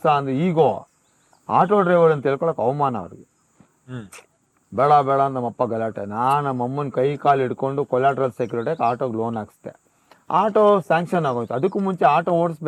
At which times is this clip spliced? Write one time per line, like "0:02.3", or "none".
none